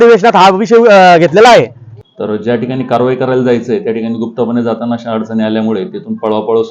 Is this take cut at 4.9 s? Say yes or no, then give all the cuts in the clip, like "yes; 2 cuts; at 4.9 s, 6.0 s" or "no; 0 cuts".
no; 1 cut; at 1.8 s